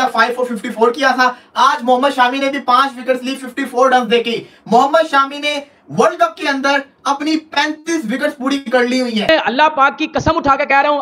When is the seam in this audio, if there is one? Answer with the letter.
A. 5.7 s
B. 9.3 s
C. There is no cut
B